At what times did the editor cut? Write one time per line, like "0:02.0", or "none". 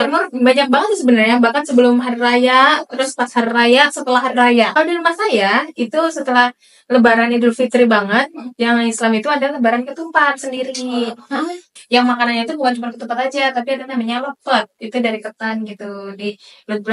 0:04.7
0:11.7